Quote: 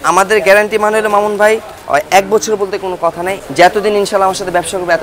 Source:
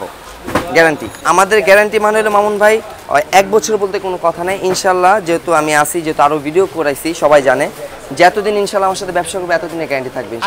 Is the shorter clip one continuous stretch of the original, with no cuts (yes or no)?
no